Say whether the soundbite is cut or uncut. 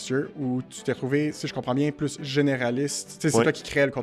uncut